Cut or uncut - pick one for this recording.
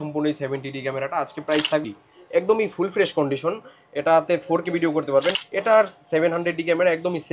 cut